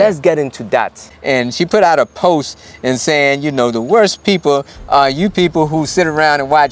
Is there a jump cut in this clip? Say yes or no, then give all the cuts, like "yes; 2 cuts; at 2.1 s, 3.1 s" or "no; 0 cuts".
yes; 1 cut; at 1.0 s